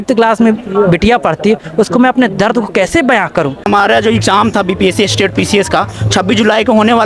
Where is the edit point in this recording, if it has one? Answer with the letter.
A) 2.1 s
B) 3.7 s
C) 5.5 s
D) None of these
B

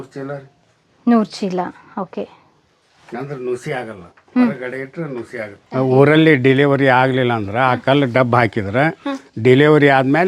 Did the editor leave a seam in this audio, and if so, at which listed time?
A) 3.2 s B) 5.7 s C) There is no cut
B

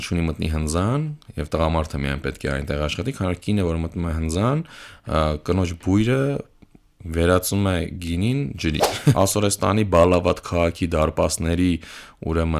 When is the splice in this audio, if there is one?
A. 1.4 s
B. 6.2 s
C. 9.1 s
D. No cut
C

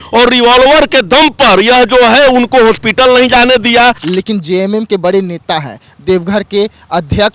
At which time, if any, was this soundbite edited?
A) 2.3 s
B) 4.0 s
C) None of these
B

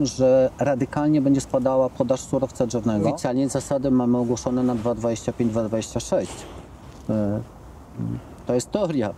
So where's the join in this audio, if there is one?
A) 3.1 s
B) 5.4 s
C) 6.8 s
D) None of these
A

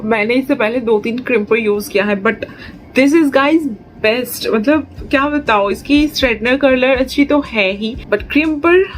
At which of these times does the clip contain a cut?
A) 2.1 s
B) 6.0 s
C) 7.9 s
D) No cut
C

